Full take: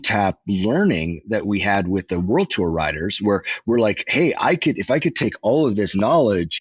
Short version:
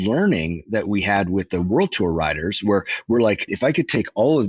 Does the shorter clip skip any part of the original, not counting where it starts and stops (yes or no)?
yes